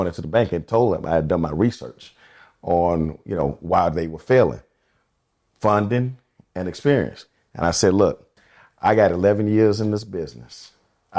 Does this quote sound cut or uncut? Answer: uncut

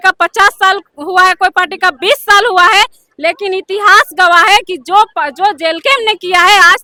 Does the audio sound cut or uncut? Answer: uncut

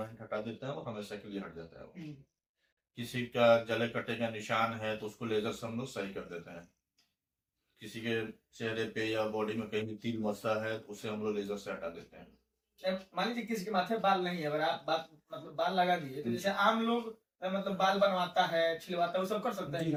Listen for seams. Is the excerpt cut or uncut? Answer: uncut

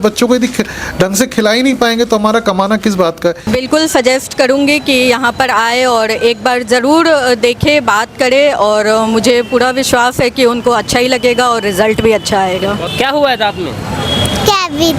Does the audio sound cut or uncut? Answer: cut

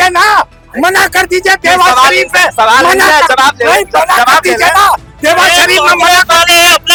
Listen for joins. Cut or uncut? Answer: uncut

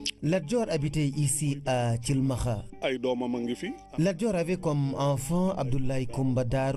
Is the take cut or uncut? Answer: uncut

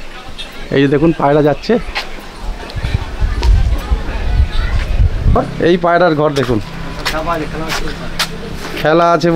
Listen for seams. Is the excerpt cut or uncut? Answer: cut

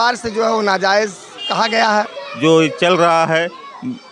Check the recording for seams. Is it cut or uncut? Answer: cut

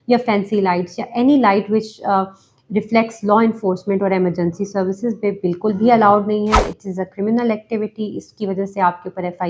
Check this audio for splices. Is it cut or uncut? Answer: uncut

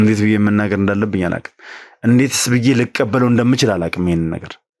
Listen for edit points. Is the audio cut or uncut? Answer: uncut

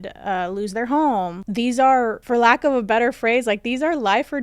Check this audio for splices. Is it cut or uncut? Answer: cut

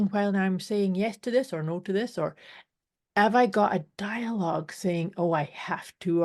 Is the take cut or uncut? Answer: uncut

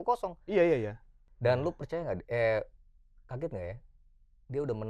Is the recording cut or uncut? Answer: cut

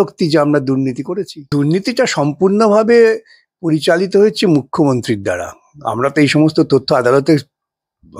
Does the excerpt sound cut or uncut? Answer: cut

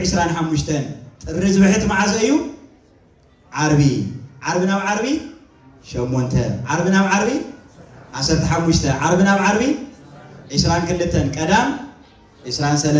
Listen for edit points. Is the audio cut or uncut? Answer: uncut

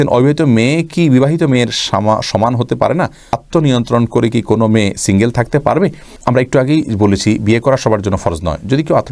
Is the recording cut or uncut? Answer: uncut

